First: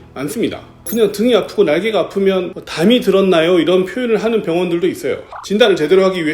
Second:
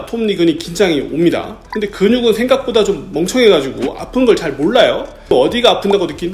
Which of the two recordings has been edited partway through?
first; 1 cut; at 5.3 s

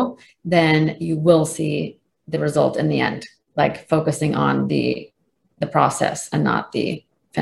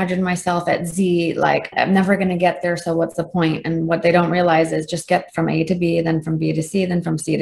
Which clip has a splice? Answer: second; 1 cut; at 1.7 s

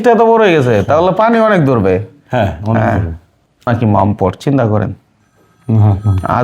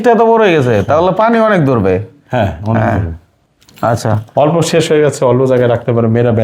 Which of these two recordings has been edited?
first; 1 cut; at 3.7 s

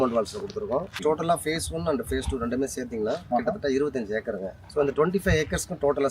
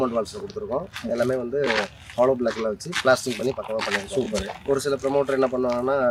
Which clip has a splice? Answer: first; 2 cuts; at 0.9 s, 4.6 s

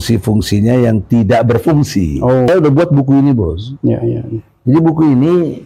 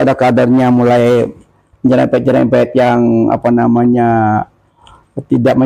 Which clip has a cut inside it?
first; 1 cut; at 2.5 s

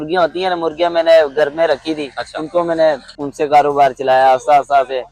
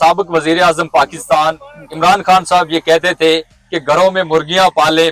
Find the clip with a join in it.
first; 1 cut; at 3.2 s

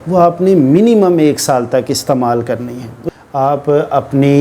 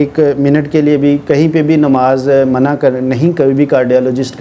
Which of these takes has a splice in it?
first; 1 cut; at 2.9 s

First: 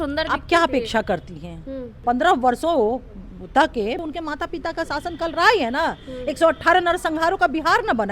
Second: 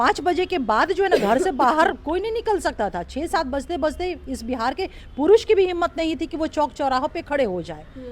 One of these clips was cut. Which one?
first; 2 cuts; at 1.9 s, 4.0 s

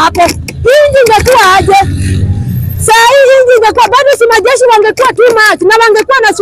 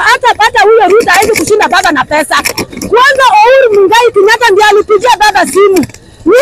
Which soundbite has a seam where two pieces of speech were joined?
second; 1 cut; at 2.6 s

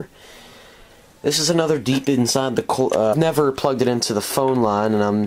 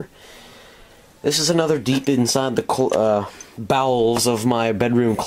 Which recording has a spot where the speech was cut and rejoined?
second; 1 cut; at 3.1 s

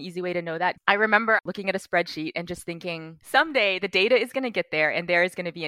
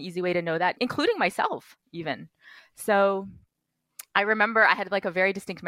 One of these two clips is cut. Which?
first; 3 cuts; at 0.8 s, 1.4 s, 3.1 s

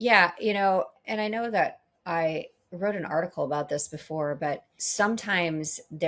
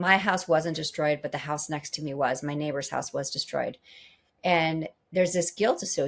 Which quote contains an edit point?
first; 2 cuts; at 1.0 s, 4.8 s

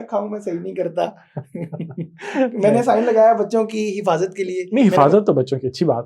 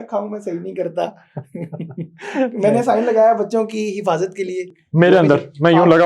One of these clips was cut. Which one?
second; 1 cut; at 4.7 s

